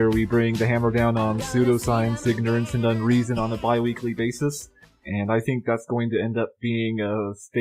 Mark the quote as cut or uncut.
uncut